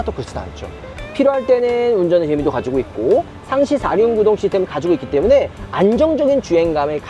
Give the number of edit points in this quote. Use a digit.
0